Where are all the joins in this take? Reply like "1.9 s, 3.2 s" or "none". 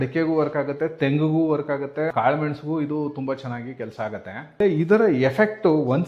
2.1 s, 4.6 s